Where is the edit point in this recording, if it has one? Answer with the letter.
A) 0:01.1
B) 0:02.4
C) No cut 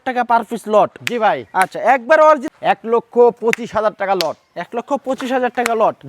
B